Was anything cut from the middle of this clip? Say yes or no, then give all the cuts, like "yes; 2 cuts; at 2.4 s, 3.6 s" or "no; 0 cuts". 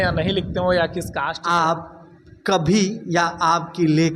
yes; 1 cut; at 1.4 s